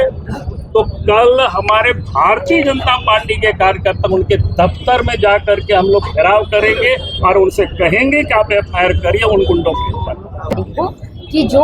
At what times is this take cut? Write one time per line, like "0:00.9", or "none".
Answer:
0:10.7